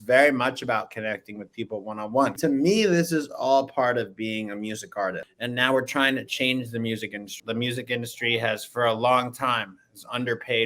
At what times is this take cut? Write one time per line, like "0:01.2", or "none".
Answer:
0:02.4
0:05.3
0:07.3